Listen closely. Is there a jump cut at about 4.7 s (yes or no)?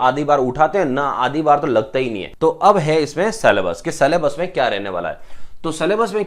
no